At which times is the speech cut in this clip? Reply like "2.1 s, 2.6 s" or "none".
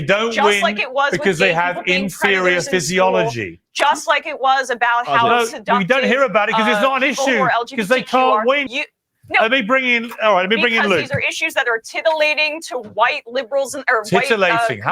8.7 s